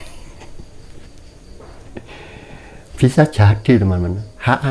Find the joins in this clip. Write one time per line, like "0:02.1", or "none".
none